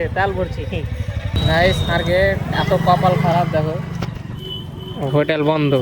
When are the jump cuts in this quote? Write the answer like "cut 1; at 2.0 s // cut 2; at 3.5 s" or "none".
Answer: cut 1; at 1.2 s